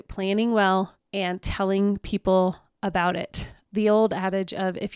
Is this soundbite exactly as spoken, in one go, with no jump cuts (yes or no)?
no